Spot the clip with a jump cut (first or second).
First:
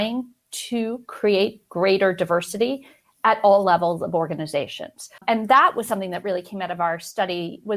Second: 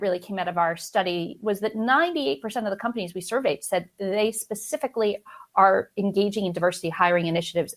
first